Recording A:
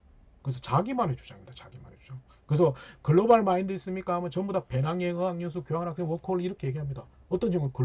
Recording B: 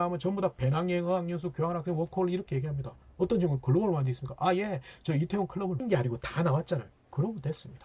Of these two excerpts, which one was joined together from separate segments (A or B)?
B